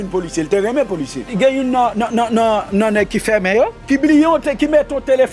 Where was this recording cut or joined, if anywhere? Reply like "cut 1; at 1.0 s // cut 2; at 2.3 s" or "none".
cut 1; at 1.3 s // cut 2; at 3.8 s